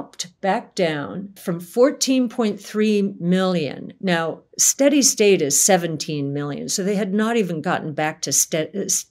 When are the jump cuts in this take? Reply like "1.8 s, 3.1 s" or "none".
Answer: 1.4 s